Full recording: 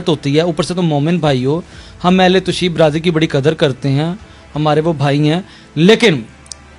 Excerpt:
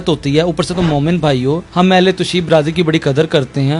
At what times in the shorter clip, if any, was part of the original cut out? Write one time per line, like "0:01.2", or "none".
0:01.7